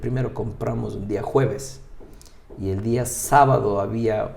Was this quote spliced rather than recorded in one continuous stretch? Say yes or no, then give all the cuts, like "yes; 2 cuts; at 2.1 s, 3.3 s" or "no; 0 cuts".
no; 0 cuts